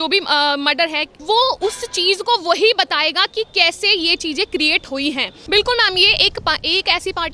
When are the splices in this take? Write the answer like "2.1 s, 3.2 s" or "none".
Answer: 1.1 s, 5.3 s